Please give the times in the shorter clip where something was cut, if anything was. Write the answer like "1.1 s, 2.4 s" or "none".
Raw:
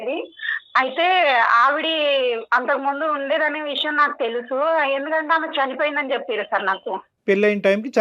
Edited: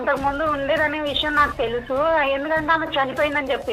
none